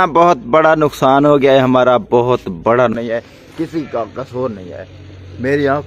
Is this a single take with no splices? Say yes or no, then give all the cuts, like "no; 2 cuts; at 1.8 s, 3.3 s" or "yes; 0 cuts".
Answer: no; 1 cut; at 2.9 s